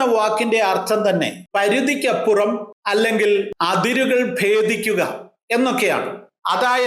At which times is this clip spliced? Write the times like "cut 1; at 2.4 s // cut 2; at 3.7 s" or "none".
cut 1; at 1.4 s // cut 2; at 2.7 s // cut 3; at 3.5 s